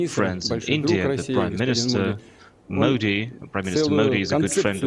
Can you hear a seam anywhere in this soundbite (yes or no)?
no